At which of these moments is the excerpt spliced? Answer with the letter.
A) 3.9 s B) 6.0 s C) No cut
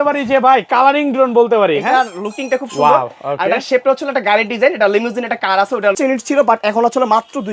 B